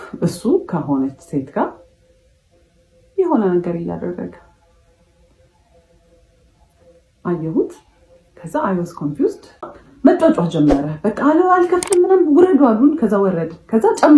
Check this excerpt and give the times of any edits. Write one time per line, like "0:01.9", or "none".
0:09.7